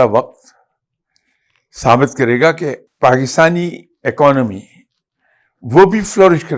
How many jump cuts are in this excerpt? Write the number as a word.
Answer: one